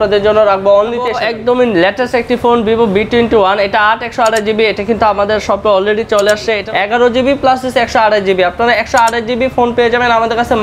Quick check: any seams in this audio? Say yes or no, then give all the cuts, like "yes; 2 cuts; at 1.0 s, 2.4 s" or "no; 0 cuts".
yes; 2 cuts; at 1.2 s, 6.6 s